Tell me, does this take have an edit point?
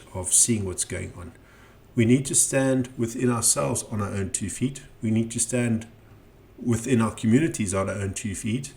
no; 0 cuts

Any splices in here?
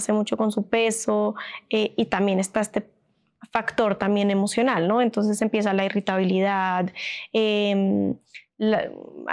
no; 0 cuts

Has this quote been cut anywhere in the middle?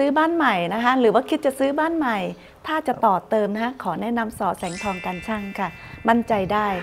no; 0 cuts

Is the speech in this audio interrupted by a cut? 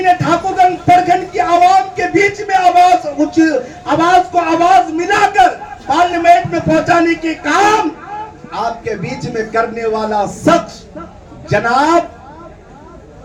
no; 0 cuts

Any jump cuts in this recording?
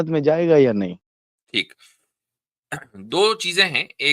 no; 0 cuts

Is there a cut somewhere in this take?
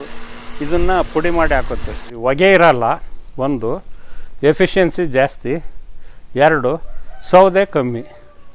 yes; 1 cut; at 2.1 s

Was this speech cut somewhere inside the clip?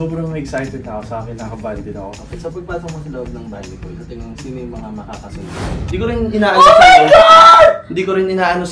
yes; 2 cuts; at 2.2 s, 5.8 s

